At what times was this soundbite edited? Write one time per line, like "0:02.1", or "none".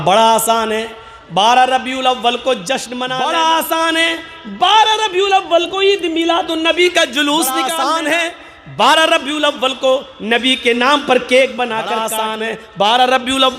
0:03.0
0:07.7
0:12.1